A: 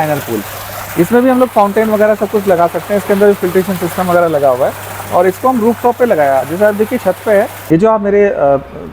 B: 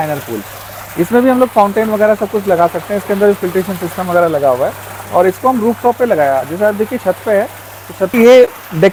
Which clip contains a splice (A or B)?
A